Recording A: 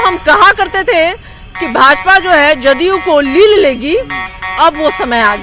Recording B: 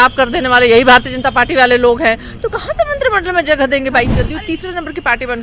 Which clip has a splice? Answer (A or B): B